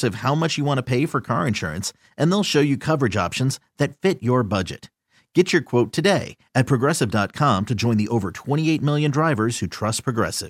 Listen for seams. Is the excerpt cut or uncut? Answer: uncut